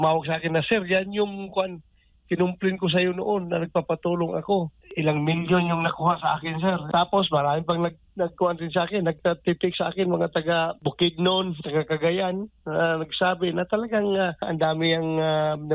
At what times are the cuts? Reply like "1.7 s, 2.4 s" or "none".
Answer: 4.8 s, 6.8 s, 10.8 s, 14.5 s